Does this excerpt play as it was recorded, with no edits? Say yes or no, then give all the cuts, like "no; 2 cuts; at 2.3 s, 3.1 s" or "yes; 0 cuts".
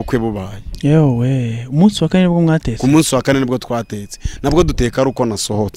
yes; 0 cuts